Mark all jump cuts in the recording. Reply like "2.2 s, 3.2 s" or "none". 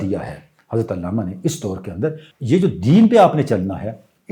2.2 s